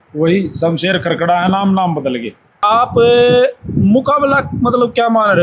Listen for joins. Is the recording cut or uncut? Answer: cut